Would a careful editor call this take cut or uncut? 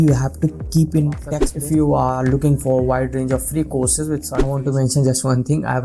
cut